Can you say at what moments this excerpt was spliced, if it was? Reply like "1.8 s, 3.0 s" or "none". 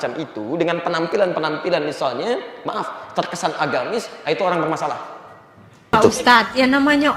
5.9 s